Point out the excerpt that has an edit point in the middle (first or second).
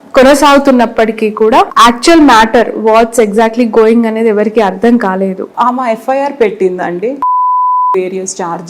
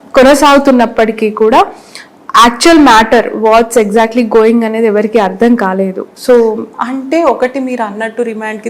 first